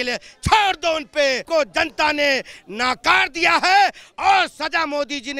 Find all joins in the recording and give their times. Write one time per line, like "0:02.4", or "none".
0:01.4